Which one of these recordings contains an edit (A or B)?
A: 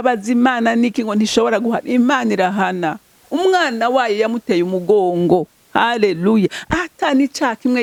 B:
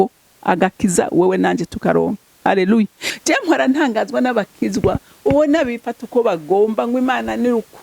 B